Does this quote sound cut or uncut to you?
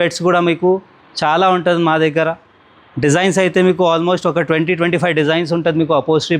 uncut